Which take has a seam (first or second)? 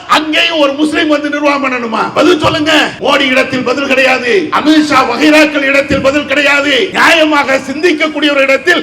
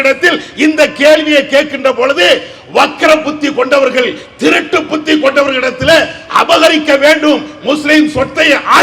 first